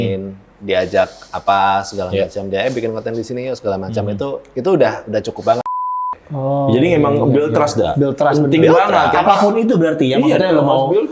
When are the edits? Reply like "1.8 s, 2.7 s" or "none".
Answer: 5.7 s